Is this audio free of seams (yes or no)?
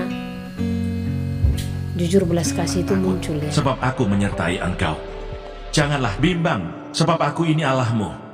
no